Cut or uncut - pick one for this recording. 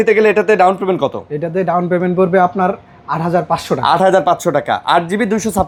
uncut